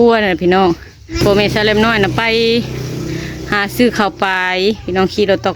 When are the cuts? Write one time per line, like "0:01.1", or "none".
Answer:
0:01.2